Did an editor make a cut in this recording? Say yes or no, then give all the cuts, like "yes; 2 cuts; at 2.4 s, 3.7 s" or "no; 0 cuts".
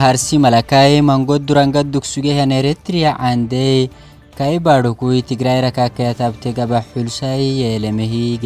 no; 0 cuts